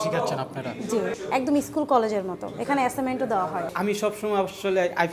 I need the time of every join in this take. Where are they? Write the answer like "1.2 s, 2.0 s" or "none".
1.2 s, 3.7 s

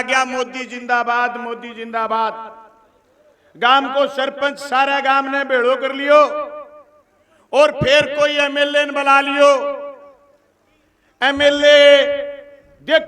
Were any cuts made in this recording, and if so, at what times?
none

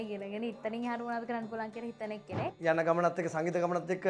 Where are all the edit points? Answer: 2.5 s

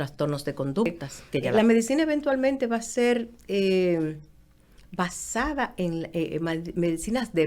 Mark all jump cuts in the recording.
1.5 s

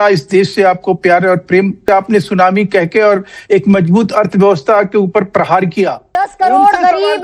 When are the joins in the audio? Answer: 1.8 s, 6.1 s

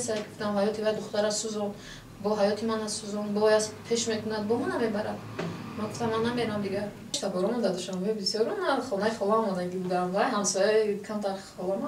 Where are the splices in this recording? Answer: 7.2 s

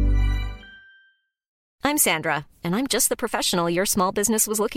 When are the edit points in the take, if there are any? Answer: 1.5 s

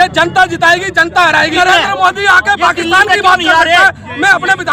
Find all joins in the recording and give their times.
1.5 s

